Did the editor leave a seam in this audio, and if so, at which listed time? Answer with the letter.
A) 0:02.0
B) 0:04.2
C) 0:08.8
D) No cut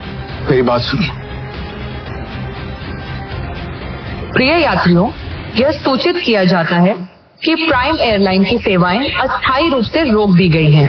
A